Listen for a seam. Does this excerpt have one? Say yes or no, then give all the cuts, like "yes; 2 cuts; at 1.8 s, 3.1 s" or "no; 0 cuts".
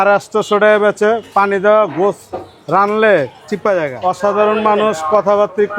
yes; 1 cut; at 3.9 s